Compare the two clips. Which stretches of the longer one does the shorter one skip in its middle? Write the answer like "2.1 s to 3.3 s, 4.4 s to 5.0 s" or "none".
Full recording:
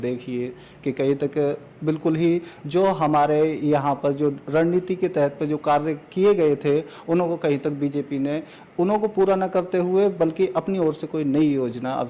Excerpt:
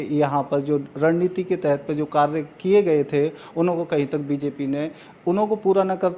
none